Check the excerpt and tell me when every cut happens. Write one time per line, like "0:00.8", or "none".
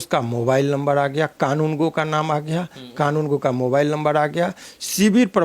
none